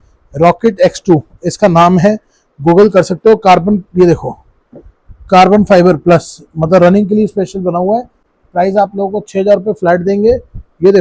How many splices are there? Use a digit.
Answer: 0